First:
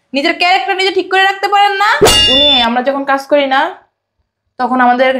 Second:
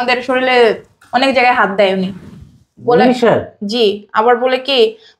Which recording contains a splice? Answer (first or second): first